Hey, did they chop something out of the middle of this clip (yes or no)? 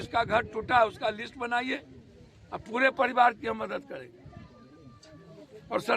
no